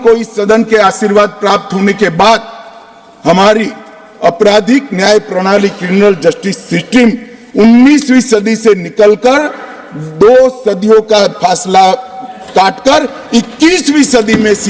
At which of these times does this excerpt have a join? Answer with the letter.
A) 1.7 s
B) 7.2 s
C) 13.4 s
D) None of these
D